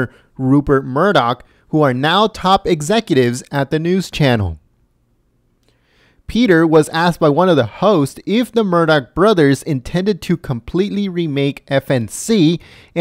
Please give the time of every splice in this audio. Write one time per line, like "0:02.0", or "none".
0:07.2